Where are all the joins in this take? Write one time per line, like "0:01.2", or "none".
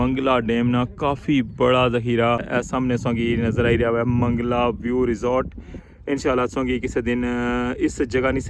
0:02.5